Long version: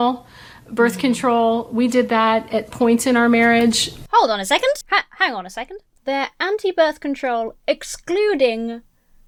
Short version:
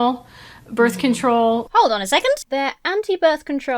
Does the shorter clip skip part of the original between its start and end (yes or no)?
yes